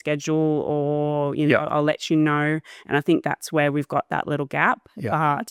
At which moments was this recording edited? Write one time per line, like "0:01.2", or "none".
none